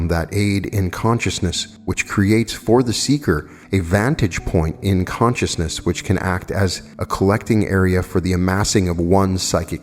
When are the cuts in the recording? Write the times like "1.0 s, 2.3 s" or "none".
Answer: 1.7 s, 3.5 s, 6.9 s